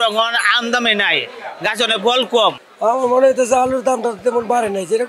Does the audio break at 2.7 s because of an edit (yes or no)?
yes